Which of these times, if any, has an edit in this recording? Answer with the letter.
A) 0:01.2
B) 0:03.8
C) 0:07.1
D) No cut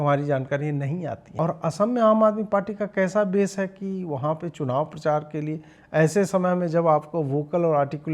A